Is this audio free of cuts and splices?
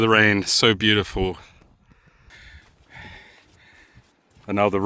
no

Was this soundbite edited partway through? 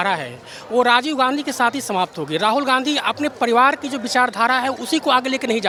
no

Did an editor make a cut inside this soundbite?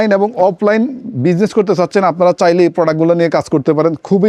no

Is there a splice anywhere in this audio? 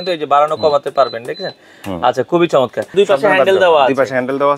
yes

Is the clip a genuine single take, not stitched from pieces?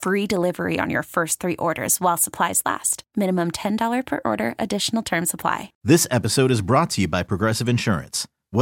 no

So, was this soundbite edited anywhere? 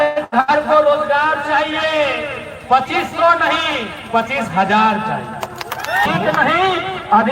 yes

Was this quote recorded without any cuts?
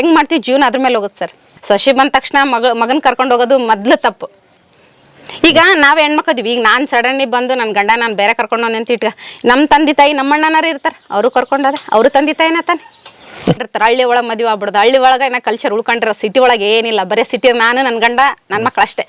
no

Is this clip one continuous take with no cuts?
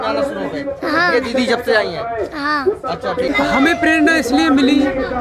no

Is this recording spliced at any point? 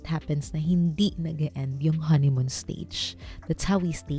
no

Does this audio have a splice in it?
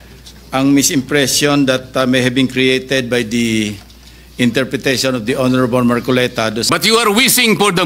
yes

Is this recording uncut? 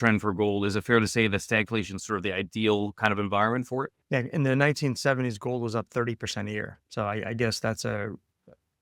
yes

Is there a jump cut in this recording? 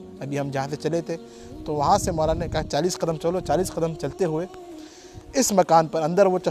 no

